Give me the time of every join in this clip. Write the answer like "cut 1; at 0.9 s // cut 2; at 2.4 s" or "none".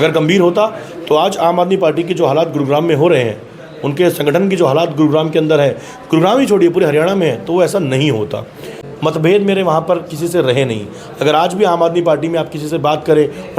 cut 1; at 8.8 s